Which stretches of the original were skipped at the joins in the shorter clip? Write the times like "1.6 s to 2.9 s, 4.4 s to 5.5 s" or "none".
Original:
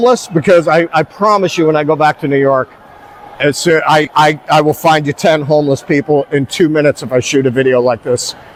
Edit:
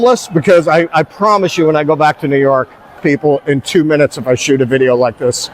3.0 s to 5.8 s